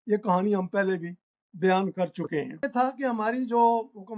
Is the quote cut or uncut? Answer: cut